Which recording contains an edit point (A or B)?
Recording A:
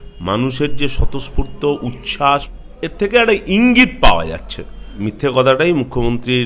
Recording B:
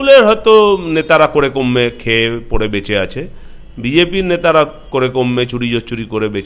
A